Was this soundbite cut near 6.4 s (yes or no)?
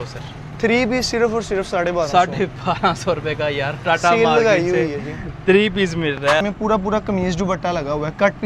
yes